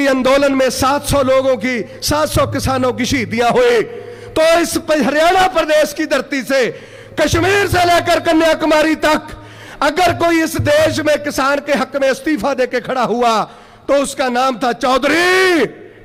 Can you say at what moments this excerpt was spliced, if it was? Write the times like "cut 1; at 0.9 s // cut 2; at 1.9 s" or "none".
none